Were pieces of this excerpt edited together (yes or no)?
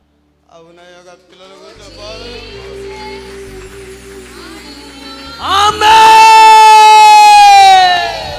no